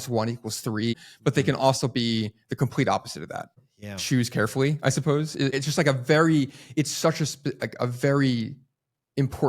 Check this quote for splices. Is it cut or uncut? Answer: cut